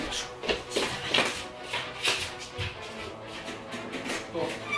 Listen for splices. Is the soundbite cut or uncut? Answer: uncut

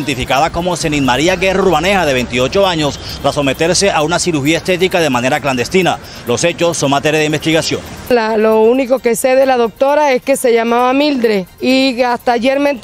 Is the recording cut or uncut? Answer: cut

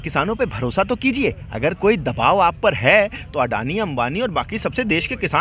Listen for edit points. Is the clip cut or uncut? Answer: uncut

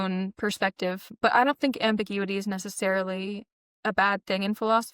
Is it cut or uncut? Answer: cut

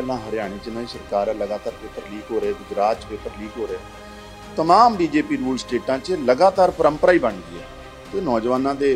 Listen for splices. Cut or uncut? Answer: uncut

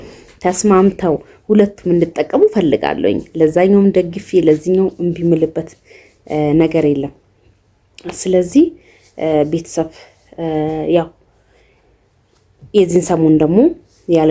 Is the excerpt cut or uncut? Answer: uncut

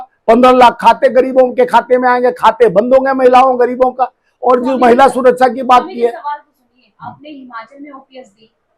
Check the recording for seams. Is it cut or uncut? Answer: uncut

